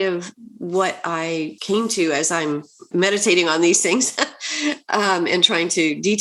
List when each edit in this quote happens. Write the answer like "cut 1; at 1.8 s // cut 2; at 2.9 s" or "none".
cut 1; at 1.6 s // cut 2; at 2.8 s